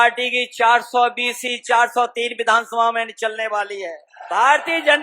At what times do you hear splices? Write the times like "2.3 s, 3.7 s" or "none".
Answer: 4.1 s